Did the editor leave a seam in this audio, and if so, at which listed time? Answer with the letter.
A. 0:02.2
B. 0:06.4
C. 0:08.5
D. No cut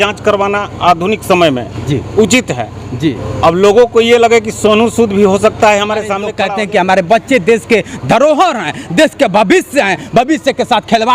B